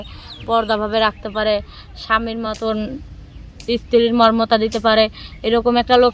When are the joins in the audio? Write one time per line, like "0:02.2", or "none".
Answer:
none